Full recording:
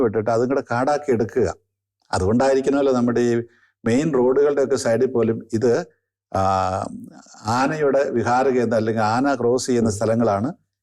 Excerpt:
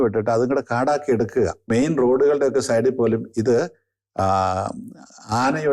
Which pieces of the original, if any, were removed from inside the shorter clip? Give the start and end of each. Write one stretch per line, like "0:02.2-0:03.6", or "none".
0:01.6-0:03.8